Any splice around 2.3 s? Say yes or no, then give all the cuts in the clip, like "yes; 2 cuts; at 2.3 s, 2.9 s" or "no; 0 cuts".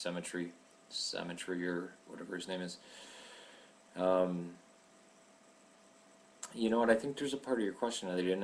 no; 1 cut; at 4.6 s